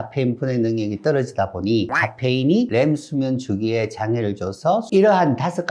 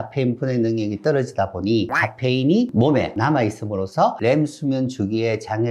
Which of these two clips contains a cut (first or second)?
first